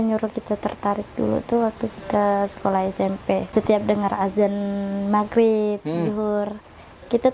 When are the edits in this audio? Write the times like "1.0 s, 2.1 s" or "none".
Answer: 3.5 s